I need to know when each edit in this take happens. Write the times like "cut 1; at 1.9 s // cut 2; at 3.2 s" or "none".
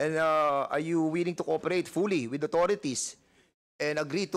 none